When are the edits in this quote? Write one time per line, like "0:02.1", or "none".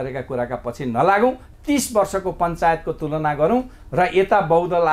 0:01.5

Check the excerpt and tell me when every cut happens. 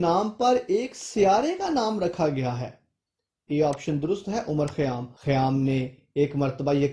0:05.1

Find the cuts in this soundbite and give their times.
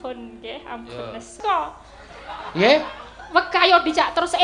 0:01.4

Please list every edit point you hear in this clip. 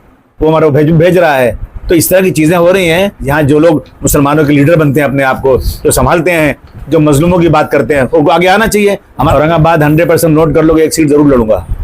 0:03.2
0:09.3

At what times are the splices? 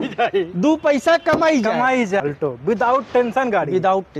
0:02.2

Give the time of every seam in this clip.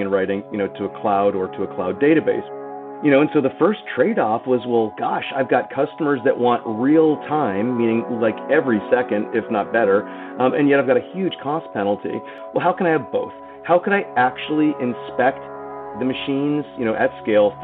0:02.5
0:12.4
0:15.9

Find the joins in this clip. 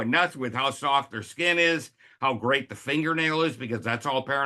none

